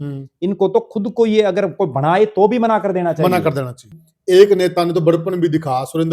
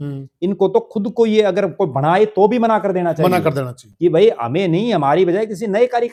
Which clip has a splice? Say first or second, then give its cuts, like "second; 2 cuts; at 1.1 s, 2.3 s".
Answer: first; 1 cut; at 3.9 s